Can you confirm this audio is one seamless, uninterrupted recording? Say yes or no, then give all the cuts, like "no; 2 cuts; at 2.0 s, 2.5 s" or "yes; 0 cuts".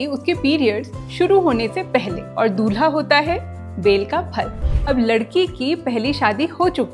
no; 1 cut; at 4.6 s